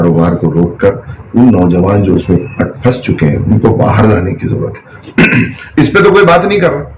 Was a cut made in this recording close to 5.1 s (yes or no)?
no